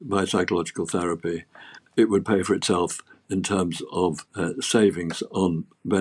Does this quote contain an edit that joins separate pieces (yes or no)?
yes